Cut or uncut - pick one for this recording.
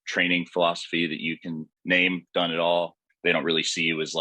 cut